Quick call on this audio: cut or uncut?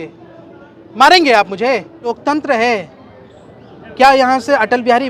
cut